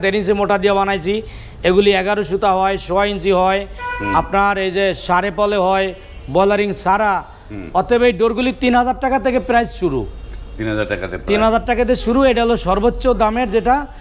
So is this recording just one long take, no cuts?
yes; 0 cuts

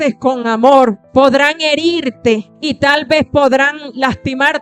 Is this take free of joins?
no; 2 cuts; at 1.0 s, 2.5 s

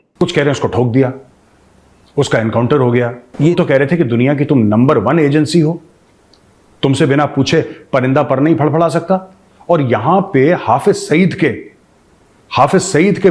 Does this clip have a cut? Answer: yes; 1 cut; at 3.5 s

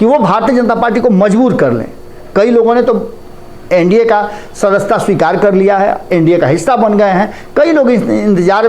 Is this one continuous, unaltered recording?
yes; 0 cuts

